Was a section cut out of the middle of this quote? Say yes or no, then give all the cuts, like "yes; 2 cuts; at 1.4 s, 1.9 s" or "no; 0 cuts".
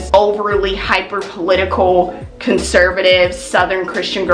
no; 0 cuts